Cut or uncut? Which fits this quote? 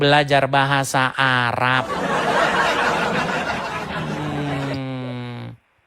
uncut